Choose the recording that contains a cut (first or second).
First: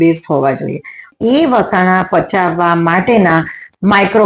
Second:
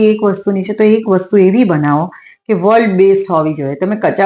first